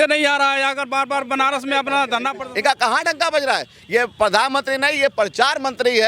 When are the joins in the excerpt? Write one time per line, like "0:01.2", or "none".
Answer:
0:02.4